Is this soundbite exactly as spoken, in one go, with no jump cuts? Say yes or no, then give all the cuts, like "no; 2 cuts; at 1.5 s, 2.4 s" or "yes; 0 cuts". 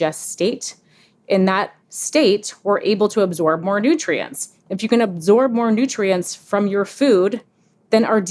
yes; 0 cuts